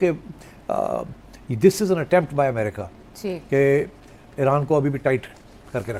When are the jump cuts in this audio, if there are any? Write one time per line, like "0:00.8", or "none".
none